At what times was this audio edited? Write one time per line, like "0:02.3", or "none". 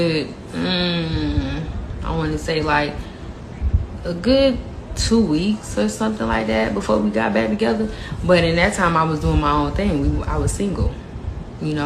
none

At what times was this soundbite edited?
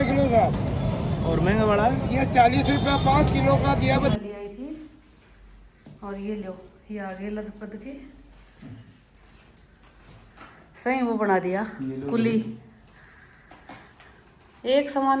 0:04.1

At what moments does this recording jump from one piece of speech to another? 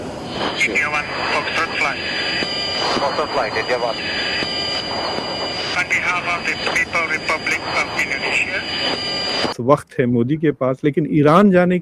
0:09.6

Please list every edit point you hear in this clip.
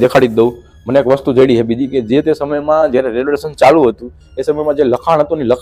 none

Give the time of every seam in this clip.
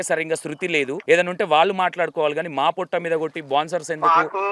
0:01.0

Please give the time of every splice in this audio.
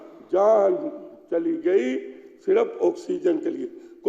none

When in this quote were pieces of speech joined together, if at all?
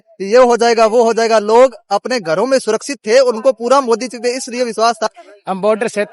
0:05.1

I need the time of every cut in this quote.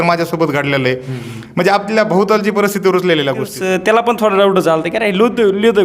0:03.6

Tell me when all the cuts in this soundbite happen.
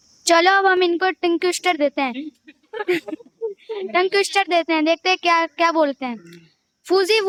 none

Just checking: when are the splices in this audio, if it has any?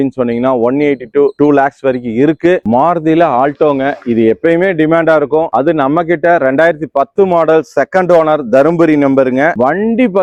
none

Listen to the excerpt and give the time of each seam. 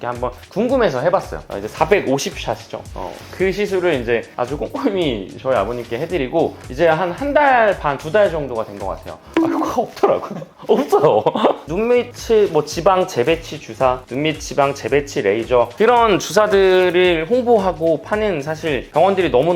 0:01.5
0:11.6
0:15.7

